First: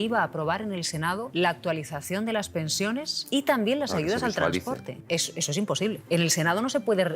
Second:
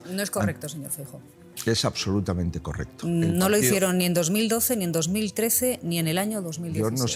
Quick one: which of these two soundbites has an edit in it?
first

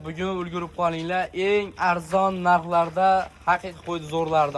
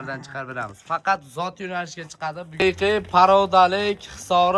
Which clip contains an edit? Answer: second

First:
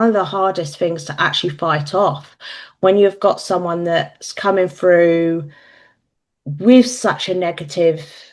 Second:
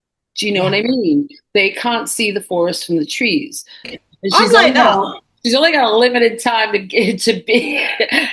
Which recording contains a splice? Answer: second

